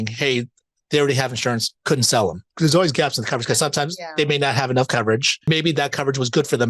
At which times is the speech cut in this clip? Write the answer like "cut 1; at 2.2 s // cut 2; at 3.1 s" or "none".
cut 1; at 1.7 s // cut 2; at 2.5 s // cut 3; at 5.5 s